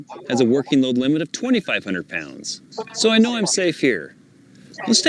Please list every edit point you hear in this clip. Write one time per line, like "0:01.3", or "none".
0:03.8